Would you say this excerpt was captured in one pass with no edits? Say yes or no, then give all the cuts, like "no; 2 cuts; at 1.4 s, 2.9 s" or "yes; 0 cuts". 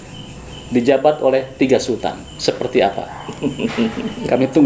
yes; 0 cuts